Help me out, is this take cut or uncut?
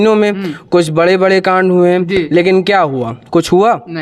uncut